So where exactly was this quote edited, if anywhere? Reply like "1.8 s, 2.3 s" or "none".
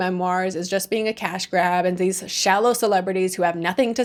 none